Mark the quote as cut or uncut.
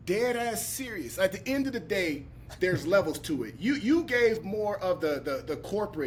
uncut